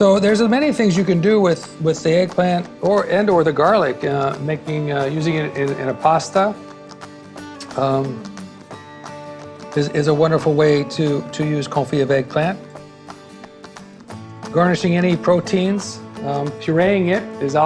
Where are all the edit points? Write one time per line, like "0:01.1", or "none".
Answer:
none